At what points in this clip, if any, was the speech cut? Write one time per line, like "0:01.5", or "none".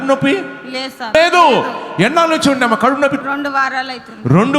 0:01.1
0:03.2